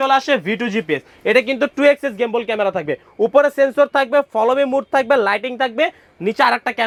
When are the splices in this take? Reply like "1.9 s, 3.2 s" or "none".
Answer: none